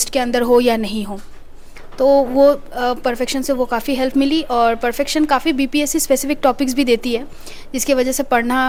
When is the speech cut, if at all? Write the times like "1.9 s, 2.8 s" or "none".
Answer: none

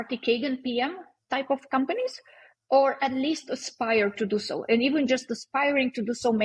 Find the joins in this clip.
none

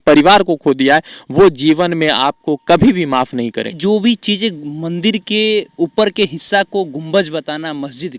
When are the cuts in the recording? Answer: 3.8 s

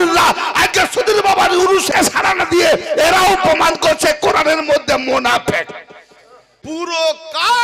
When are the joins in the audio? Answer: 1.9 s, 6.5 s

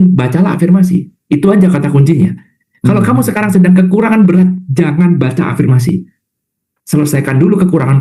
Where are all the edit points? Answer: none

